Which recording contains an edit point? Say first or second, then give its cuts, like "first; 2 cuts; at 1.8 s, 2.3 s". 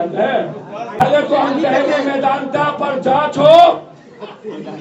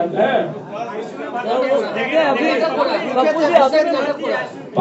first; 1 cut; at 1.0 s